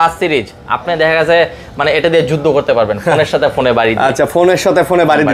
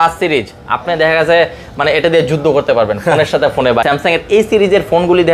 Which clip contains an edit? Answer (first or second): second